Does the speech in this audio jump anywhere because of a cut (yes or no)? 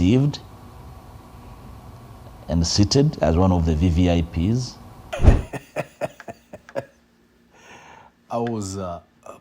yes